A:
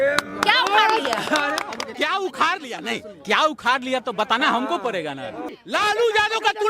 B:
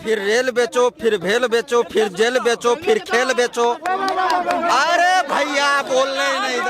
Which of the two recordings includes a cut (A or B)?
A